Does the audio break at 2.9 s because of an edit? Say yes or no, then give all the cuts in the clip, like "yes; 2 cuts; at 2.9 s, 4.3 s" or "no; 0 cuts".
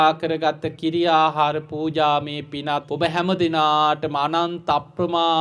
yes; 1 cut; at 2.9 s